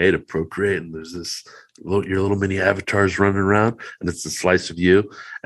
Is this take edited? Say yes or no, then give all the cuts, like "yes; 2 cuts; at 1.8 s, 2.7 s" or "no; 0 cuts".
no; 0 cuts